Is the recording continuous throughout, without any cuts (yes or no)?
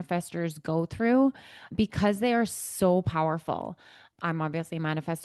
yes